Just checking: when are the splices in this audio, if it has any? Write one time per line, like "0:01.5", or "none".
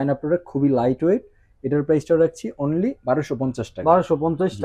none